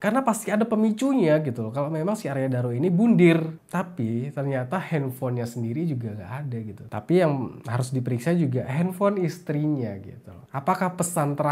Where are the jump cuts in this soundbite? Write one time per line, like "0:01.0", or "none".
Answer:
0:03.5